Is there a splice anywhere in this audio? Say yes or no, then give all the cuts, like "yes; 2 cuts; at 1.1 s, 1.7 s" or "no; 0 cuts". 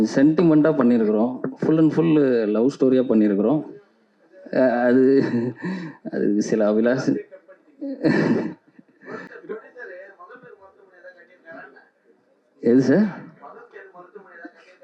no; 0 cuts